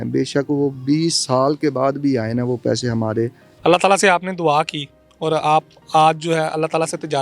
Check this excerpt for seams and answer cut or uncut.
cut